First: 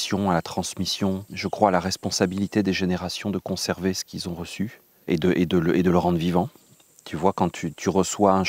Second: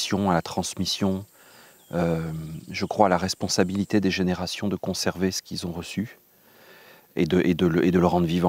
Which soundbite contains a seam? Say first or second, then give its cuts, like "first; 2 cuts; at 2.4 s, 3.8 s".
first; 2 cuts; at 1.3 s, 4.9 s